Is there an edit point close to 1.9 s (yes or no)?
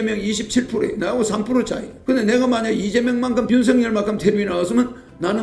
yes